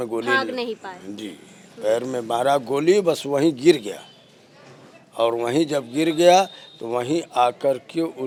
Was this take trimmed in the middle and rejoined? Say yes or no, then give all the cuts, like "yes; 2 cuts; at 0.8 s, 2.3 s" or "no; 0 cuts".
no; 0 cuts